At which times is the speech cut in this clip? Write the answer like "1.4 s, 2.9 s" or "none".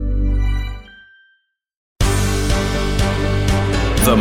1.9 s